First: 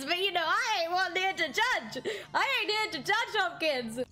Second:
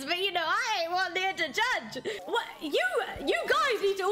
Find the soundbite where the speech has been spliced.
second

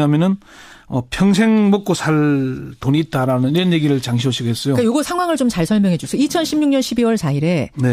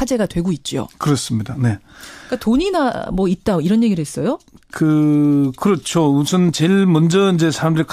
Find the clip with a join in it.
second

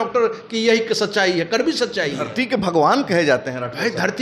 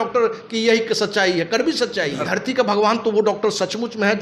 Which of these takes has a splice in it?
second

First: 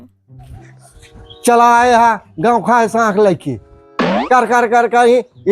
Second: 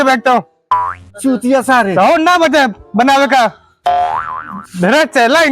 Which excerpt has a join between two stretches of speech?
second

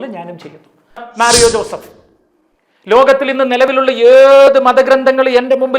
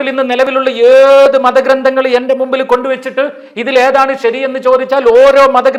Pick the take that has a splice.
first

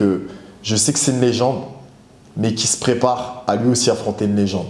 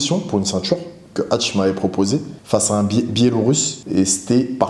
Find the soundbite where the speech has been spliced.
second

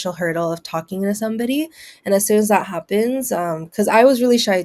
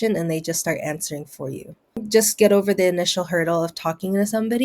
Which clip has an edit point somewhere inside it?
second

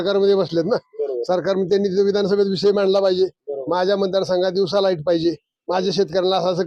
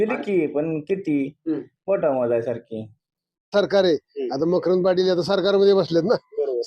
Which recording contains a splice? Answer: second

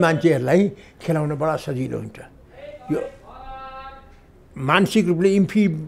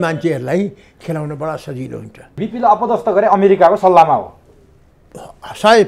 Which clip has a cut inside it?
second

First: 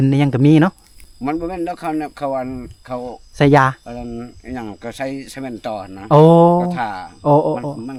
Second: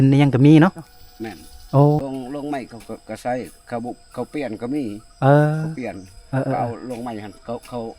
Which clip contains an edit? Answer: second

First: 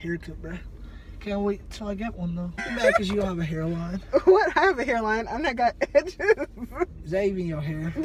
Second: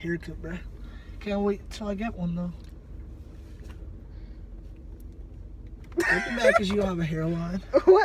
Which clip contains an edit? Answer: first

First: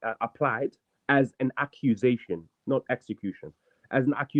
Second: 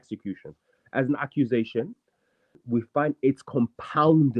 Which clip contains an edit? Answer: second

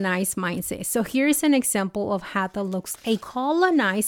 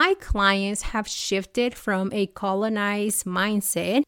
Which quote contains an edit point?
first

